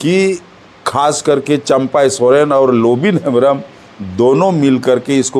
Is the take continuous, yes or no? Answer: yes